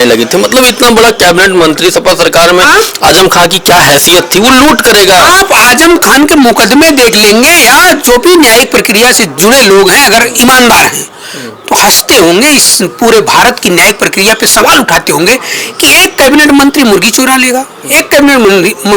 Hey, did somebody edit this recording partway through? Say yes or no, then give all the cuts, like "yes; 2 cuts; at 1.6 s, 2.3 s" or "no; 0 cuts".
no; 0 cuts